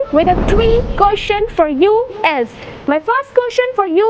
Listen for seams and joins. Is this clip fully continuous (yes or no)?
yes